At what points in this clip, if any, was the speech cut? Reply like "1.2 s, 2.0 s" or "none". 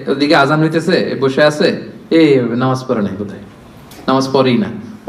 none